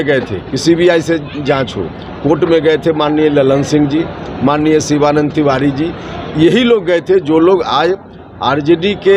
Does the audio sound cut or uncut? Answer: uncut